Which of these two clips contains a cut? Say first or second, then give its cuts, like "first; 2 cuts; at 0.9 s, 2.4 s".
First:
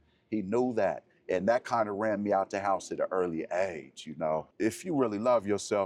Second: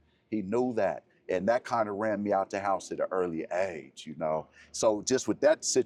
first; 1 cut; at 4.5 s